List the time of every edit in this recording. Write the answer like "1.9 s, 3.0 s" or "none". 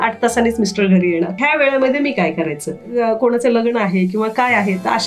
1.4 s, 2.9 s